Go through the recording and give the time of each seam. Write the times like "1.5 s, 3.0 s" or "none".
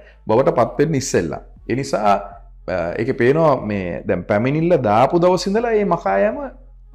none